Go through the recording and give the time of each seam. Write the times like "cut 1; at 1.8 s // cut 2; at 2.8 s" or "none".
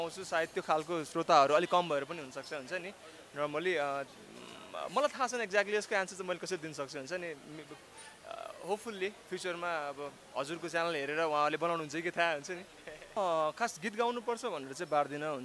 cut 1; at 13.2 s